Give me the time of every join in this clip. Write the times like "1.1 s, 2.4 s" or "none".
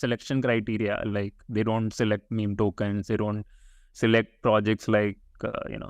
none